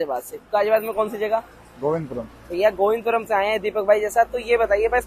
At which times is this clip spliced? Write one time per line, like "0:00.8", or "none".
none